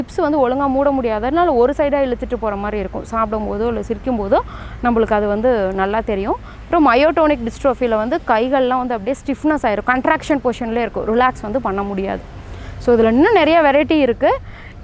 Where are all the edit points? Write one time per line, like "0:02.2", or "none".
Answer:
none